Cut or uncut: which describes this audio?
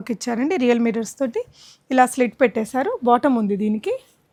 uncut